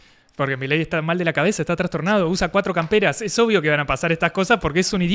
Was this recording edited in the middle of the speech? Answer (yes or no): no